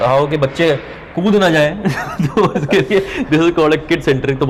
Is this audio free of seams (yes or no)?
yes